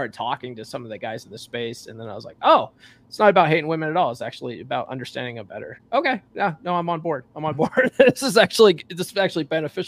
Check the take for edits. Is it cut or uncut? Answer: uncut